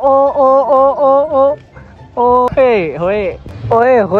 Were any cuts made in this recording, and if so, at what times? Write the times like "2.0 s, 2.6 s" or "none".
2.5 s